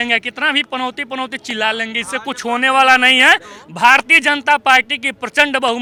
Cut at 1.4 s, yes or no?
no